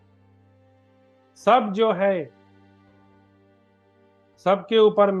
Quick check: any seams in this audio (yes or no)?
yes